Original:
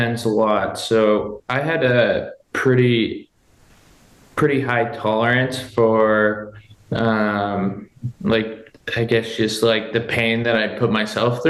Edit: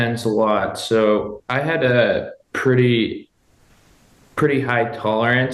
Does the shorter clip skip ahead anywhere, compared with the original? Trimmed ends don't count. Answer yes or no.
no